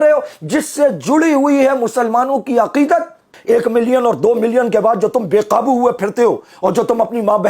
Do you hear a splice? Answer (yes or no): yes